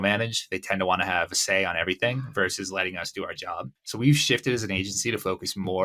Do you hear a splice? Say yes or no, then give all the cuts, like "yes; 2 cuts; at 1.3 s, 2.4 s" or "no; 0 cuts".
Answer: yes; 1 cut; at 3.8 s